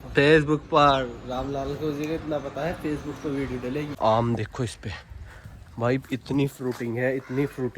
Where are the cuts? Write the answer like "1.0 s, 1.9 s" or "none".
3.9 s